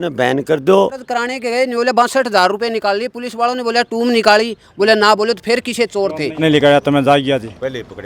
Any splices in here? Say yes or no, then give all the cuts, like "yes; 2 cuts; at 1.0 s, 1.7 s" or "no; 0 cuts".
yes; 2 cuts; at 1.0 s, 6.4 s